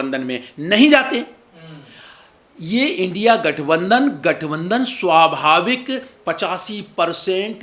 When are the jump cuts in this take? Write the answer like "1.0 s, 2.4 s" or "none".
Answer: none